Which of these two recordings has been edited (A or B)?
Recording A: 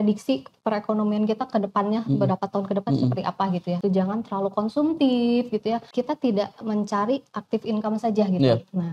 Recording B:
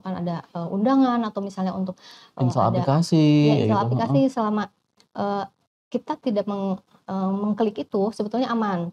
A